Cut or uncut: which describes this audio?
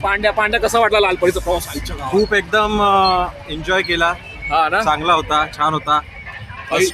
uncut